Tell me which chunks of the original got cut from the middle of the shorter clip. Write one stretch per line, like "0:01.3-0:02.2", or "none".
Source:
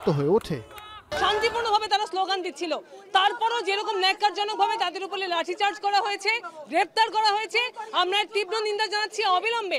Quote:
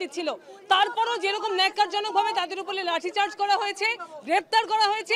none